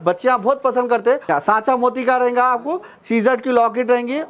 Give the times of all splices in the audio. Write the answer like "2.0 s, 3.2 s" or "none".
1.3 s